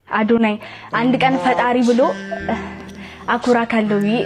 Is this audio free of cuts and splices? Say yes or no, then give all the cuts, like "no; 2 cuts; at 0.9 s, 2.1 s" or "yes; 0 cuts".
yes; 0 cuts